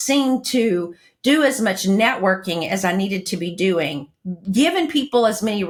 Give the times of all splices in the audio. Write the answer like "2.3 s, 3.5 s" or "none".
none